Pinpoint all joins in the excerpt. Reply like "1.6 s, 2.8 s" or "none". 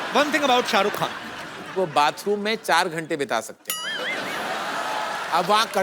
1.8 s